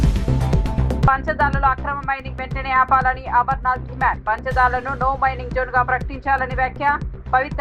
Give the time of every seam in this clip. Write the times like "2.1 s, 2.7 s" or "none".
1.1 s